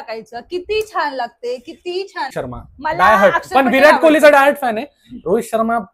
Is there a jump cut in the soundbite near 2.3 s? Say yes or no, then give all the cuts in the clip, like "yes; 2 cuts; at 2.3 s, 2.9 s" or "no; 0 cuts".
yes; 1 cut; at 2.3 s